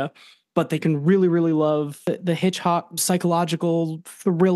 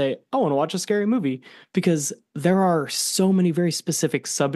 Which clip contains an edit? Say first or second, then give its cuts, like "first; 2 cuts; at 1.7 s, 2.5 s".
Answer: first; 1 cut; at 2.1 s